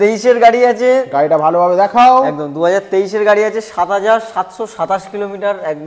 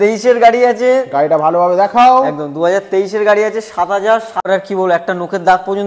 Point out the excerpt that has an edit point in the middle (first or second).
second